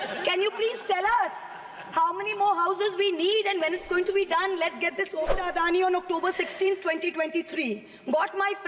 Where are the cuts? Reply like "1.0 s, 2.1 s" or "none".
5.3 s